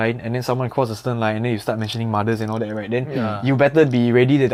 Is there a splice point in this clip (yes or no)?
no